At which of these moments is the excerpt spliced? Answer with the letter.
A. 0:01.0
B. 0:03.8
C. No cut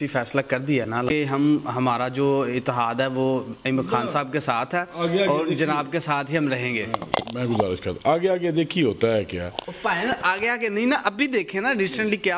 A